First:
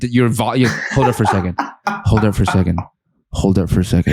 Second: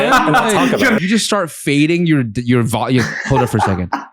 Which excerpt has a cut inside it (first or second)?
second